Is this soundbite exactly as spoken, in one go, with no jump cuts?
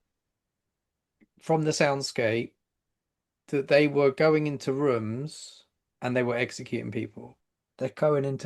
no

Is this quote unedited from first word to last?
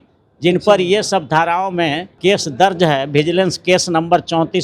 no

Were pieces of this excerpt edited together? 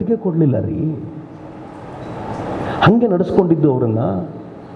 no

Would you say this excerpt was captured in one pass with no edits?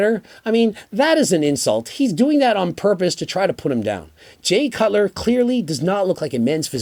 yes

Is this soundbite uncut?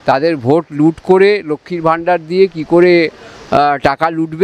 yes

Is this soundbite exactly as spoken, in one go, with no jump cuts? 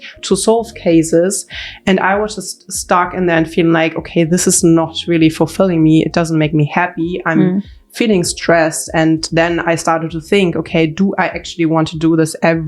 yes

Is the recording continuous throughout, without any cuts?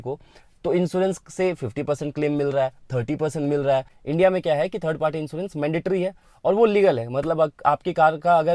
no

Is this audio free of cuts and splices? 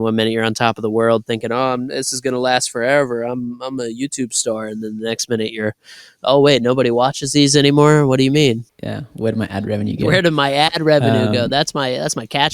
no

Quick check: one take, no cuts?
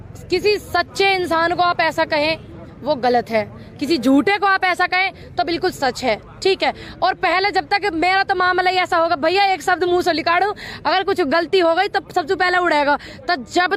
yes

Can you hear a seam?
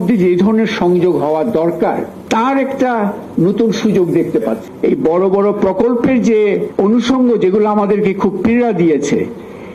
yes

